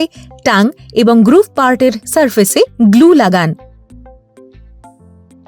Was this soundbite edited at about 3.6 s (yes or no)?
yes